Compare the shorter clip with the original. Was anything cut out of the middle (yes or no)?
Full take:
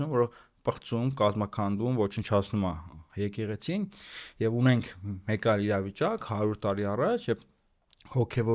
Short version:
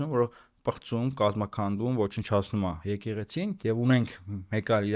yes